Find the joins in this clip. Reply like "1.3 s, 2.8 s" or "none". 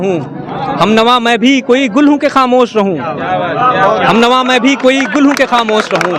none

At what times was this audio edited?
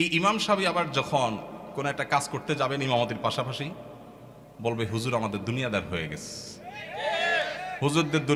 none

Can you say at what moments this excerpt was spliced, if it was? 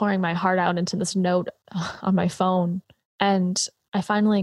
3.0 s

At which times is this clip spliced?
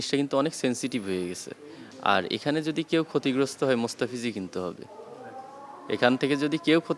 none

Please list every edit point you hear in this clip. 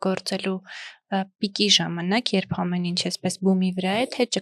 none

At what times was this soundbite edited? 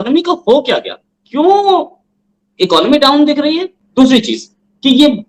none

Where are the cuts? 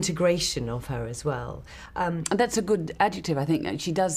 1.6 s

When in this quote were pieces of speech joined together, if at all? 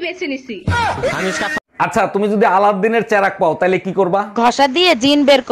1.6 s

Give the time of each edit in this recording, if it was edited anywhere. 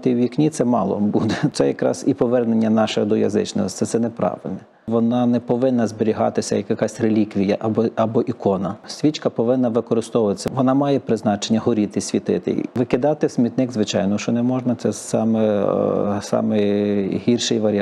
1.5 s, 4.9 s, 8.9 s, 10.4 s, 12.7 s

